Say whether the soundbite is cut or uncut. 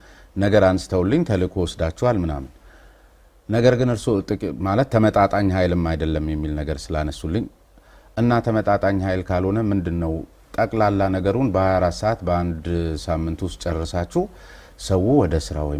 uncut